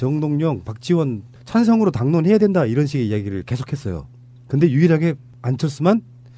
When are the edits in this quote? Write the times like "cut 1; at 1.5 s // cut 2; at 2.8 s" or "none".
none